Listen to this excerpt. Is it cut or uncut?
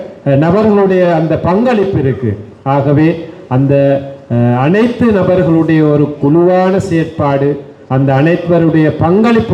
uncut